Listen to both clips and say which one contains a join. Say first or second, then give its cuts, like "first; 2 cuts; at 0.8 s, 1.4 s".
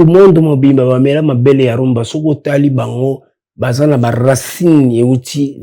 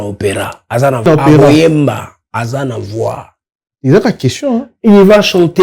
second; 1 cut; at 1.1 s